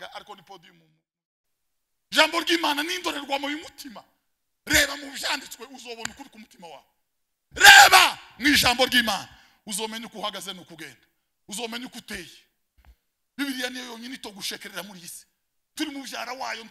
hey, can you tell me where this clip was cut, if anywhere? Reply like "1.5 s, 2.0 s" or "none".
1.3 s